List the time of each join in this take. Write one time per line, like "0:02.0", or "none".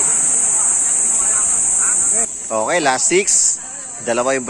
0:02.3